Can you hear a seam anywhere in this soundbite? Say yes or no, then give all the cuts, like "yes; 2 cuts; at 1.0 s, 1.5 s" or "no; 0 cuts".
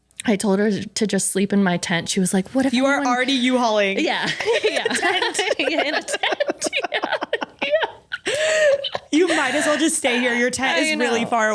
no; 0 cuts